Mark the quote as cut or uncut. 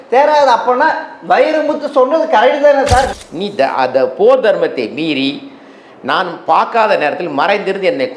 cut